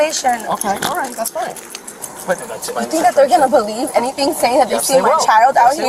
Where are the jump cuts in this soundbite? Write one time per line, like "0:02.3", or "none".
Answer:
0:02.4